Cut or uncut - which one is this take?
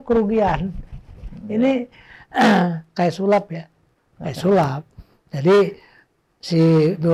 uncut